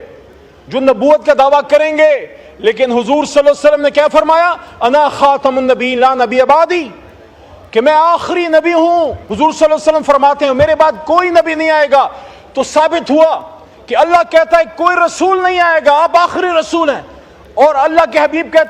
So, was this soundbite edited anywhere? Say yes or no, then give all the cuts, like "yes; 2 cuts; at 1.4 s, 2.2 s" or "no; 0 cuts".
no; 0 cuts